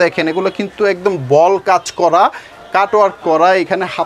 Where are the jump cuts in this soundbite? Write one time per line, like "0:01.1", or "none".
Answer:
none